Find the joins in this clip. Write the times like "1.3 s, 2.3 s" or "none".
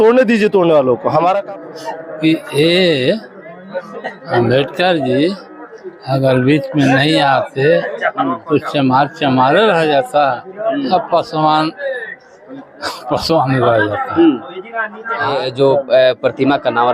1.4 s, 15.3 s